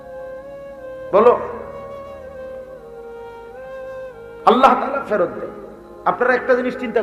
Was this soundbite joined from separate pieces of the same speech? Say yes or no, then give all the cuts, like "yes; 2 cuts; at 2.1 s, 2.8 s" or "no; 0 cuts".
no; 0 cuts